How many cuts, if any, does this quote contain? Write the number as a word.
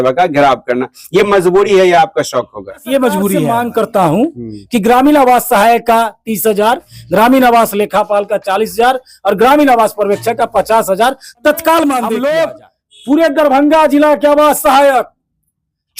two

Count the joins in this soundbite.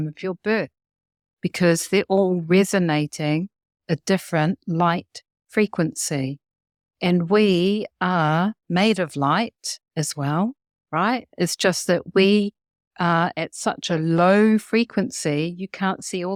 zero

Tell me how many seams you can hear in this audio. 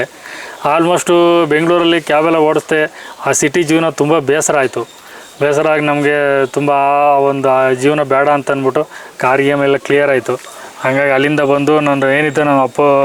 zero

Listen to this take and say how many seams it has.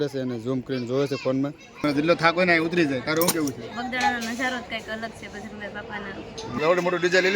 two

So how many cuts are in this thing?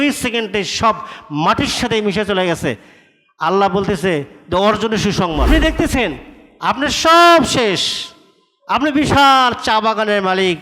one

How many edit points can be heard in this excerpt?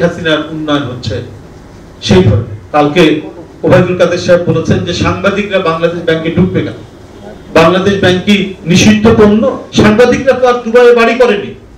two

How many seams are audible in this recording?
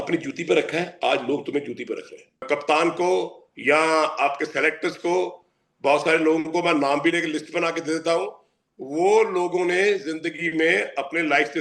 one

